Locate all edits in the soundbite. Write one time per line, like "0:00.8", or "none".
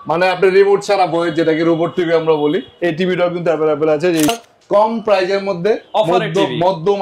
0:04.3